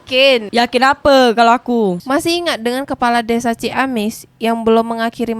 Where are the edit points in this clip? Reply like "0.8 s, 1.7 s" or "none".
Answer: 2.0 s